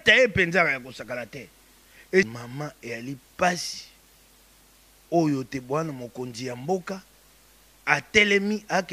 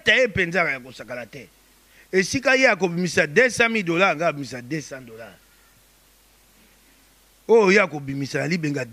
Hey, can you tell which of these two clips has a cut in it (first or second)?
first